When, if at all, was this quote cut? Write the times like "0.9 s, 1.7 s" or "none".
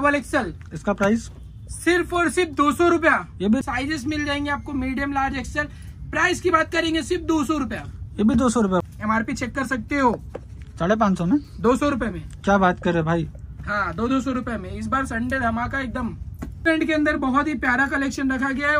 3.6 s, 8.8 s, 16.7 s